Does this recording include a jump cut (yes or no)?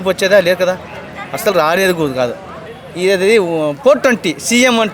yes